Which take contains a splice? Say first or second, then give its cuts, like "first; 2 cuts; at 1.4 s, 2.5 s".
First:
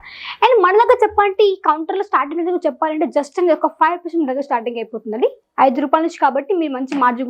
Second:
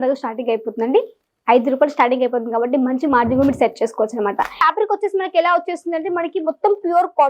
second; 1 cut; at 4.6 s